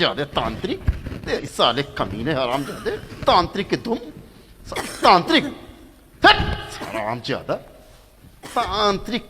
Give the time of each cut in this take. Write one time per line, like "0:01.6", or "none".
0:01.5